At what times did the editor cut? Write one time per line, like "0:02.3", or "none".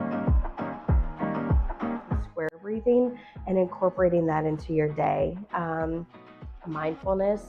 0:02.3